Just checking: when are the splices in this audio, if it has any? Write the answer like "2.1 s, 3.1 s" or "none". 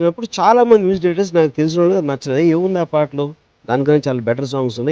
none